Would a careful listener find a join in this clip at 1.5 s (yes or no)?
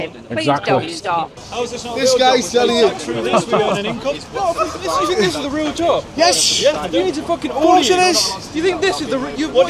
yes